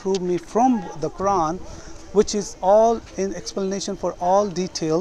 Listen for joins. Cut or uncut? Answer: uncut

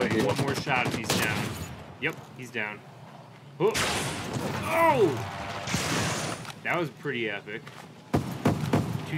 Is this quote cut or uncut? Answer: uncut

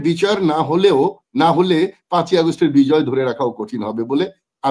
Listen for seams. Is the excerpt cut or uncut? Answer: uncut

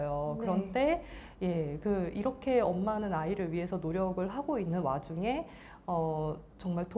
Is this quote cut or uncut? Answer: uncut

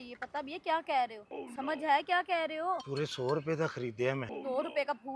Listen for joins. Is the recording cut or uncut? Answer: cut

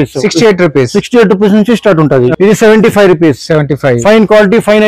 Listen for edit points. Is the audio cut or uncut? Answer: cut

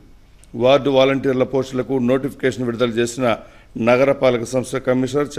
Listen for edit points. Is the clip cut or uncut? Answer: uncut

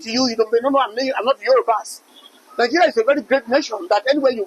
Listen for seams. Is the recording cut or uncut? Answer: cut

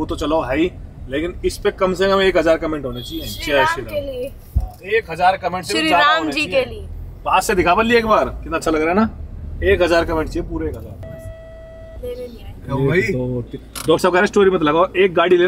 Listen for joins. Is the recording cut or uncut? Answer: uncut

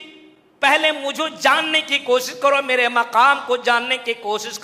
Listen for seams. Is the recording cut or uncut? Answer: uncut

